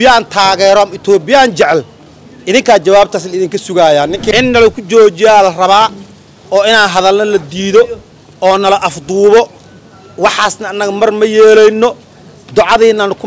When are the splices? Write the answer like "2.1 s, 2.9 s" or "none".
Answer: 4.3 s